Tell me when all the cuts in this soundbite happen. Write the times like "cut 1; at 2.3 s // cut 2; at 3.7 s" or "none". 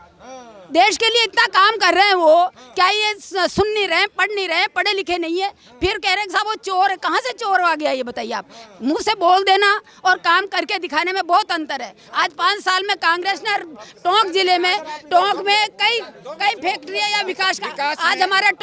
none